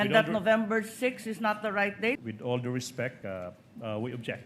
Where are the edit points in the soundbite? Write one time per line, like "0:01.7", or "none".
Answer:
0:02.2
0:03.2